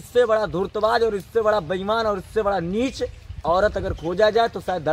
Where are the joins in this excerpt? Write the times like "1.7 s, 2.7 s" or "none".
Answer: none